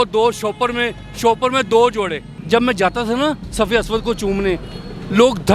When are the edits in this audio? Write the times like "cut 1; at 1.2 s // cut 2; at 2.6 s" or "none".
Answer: cut 1; at 2.4 s